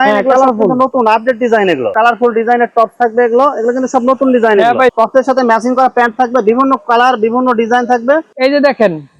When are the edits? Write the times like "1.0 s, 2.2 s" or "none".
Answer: 1.9 s, 4.9 s, 8.3 s